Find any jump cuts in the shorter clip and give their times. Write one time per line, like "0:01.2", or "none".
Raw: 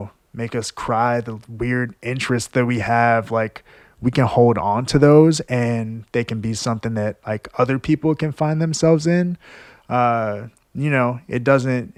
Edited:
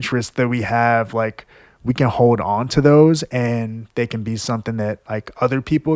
none